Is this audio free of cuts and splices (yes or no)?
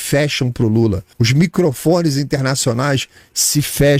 no